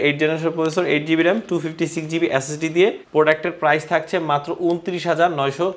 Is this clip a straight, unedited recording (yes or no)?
no